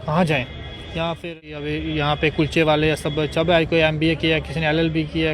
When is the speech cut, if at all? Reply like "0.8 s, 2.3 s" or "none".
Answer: 1.3 s